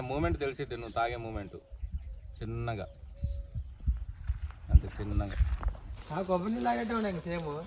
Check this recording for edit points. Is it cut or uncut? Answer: cut